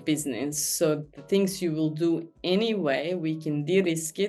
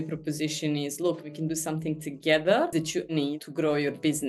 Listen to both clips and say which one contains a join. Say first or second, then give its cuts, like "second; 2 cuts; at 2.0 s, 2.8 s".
second; 2 cuts; at 1.4 s, 3.0 s